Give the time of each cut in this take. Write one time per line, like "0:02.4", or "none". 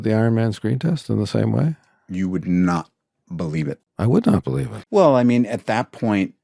0:03.8
0:04.7